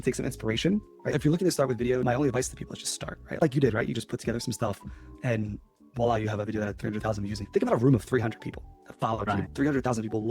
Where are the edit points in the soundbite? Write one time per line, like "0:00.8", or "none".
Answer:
0:01.1